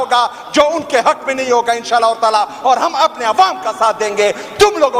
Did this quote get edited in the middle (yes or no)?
no